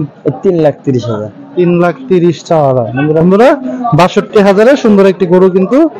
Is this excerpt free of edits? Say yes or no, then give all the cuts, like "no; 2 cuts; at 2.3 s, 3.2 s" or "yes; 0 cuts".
no; 1 cut; at 3.2 s